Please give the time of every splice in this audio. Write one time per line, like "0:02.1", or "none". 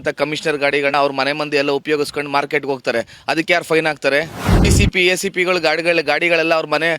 0:00.9
0:04.7